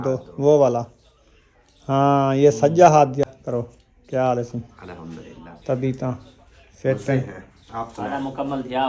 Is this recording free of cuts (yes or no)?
yes